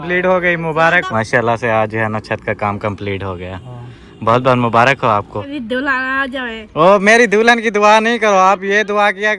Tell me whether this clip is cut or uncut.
cut